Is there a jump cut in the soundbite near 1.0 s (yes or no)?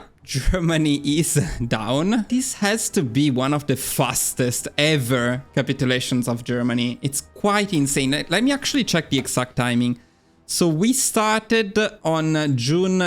no